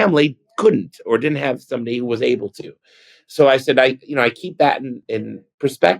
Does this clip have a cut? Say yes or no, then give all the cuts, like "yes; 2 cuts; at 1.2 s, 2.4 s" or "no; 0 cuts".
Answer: yes; 1 cut; at 5.0 s